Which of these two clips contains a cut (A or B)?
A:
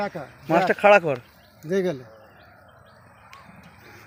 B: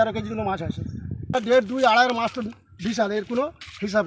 B